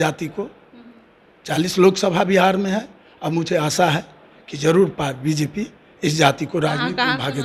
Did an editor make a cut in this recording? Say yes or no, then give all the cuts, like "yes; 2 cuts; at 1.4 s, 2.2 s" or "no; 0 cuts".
no; 0 cuts